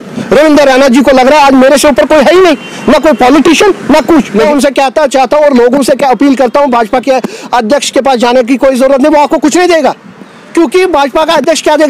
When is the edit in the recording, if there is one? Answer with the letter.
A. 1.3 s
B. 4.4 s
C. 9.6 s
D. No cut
B